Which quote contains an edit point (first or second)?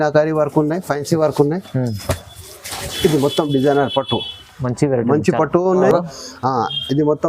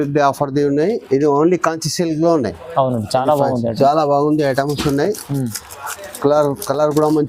first